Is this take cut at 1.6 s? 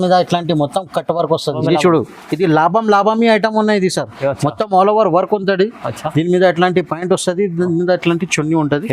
yes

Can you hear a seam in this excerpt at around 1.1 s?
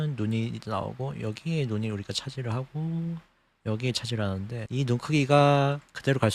no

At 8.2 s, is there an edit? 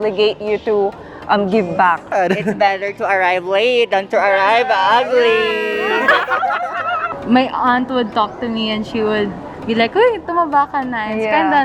no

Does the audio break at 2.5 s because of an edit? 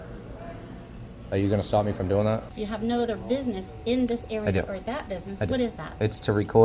yes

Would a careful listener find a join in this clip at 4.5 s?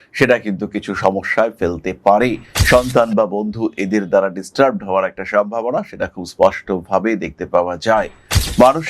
no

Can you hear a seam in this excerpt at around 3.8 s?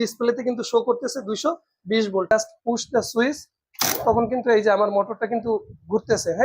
no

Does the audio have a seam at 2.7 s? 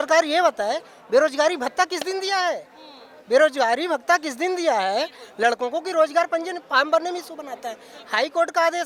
no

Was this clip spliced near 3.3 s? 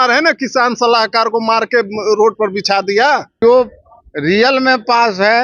yes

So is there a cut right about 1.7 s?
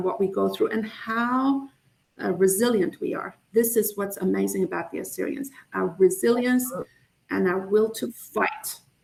no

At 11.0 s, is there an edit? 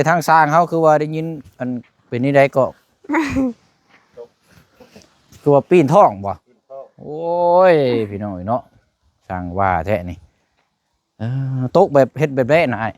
no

